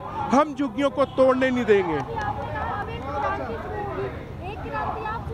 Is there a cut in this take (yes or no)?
no